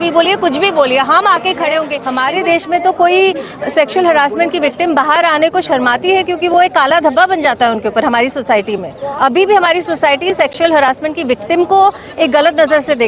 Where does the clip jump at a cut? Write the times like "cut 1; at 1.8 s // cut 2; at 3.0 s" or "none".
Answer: cut 1; at 2.0 s